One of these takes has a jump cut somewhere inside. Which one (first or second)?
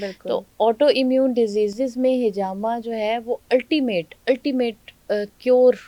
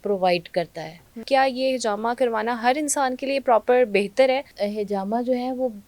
second